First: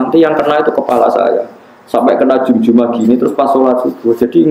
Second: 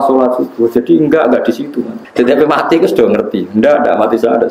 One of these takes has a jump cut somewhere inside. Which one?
second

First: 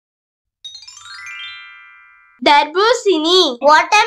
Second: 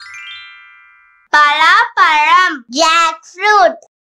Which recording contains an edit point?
second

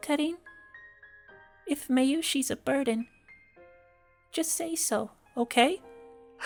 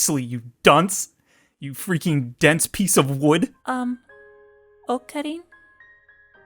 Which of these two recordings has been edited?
second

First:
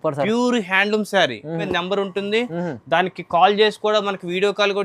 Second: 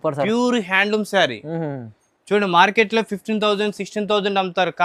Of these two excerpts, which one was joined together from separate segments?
first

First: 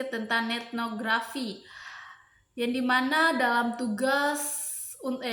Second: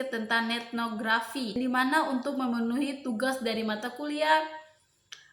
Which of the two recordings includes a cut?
second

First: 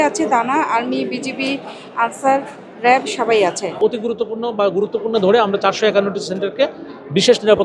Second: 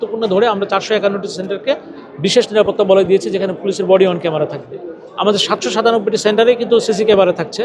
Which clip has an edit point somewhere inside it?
first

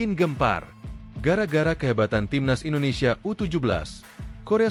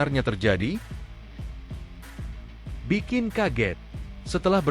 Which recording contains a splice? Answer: second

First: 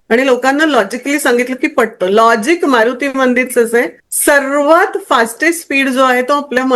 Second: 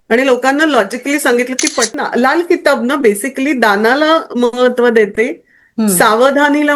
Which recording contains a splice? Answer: second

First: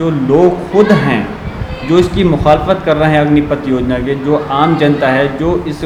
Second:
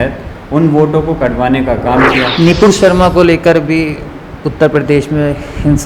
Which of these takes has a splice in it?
second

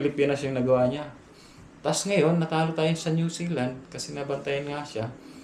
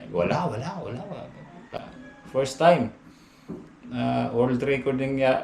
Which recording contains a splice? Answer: second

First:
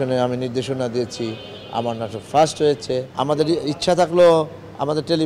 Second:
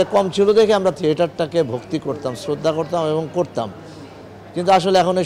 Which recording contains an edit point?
first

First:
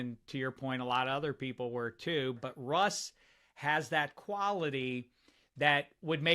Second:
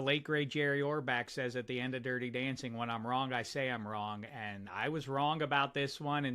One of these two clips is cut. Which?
first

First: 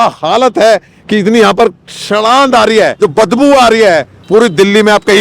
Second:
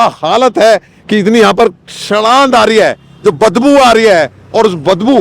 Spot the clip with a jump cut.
first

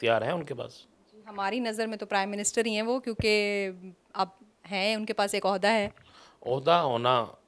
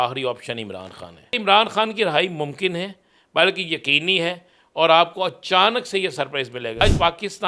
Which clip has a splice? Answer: second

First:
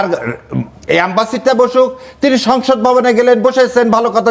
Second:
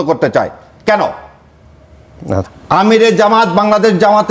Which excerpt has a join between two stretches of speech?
second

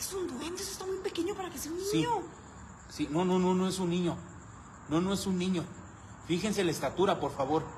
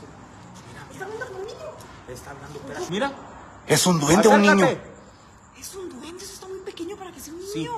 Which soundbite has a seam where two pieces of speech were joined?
second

